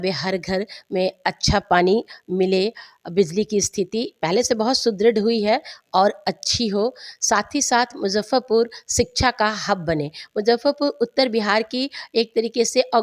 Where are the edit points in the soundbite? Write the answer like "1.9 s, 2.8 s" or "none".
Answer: none